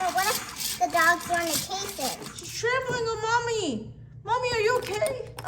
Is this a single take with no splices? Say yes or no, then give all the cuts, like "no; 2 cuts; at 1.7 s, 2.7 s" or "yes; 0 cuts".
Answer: no; 1 cut; at 2.4 s